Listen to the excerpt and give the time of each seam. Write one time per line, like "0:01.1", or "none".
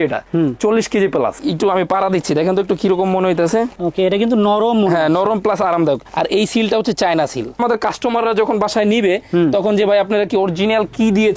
0:01.4
0:07.6